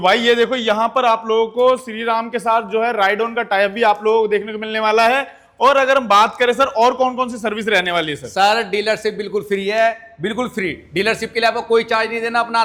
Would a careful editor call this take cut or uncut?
uncut